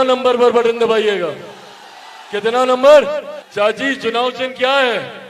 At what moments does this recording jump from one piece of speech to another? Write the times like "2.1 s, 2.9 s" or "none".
3.4 s